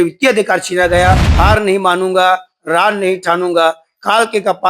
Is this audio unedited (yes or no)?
no